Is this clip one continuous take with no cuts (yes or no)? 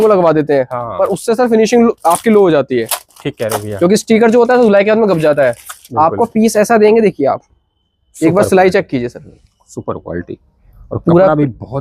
yes